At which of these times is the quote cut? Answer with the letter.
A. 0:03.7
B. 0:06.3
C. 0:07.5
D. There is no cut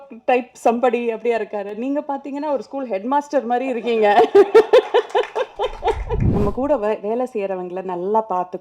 B